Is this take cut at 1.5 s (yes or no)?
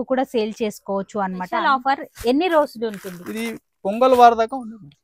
yes